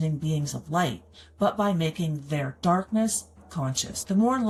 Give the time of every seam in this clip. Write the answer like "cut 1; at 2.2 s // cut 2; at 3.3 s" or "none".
none